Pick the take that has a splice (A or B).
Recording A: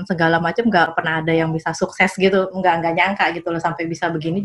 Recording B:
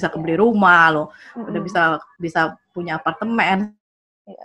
A